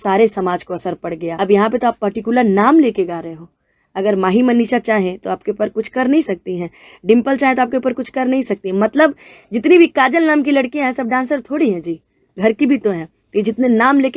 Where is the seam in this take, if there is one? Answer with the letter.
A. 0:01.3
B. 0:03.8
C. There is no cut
A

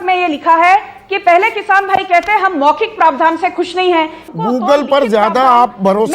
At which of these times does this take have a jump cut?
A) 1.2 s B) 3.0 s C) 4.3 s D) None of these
C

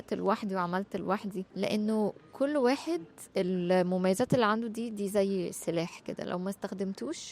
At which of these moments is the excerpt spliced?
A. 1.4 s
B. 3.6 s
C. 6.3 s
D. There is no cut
A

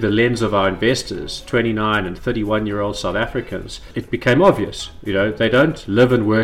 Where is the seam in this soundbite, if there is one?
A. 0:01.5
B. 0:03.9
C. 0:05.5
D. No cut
B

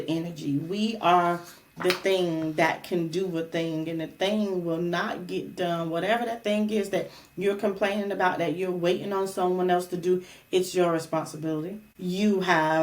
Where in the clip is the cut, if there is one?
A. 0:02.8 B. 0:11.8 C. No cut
B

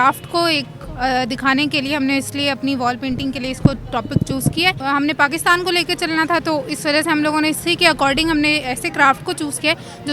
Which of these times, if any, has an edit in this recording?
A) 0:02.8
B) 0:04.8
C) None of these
B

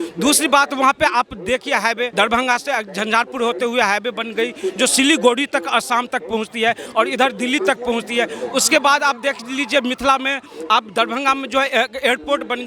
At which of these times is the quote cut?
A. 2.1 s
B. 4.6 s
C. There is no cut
A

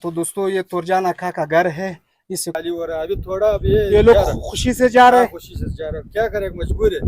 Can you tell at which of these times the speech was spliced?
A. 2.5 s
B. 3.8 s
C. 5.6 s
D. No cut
A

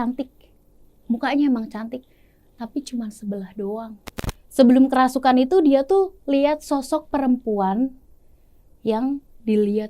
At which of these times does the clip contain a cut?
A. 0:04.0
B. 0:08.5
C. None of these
A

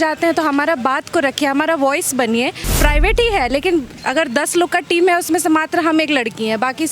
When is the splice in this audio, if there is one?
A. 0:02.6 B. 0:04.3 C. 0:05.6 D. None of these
A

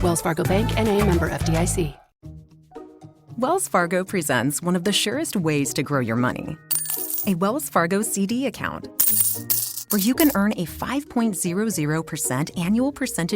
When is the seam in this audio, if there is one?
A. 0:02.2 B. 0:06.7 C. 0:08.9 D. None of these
A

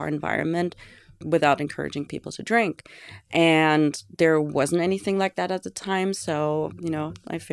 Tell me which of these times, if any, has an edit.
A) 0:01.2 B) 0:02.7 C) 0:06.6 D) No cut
A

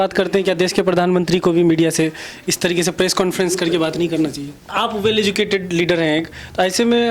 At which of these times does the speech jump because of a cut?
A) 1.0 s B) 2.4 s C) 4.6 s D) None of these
C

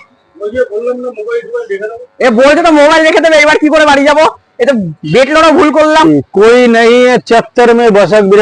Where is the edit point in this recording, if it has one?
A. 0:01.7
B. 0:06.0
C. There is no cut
B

